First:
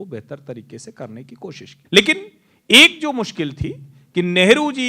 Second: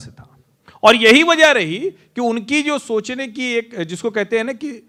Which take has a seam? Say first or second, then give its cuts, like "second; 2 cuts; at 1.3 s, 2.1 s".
first; 1 cut; at 1.7 s